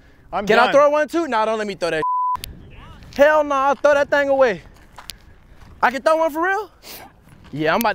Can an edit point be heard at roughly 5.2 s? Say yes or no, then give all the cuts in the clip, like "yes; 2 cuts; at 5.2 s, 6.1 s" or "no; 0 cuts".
no; 1 cut; at 6.8 s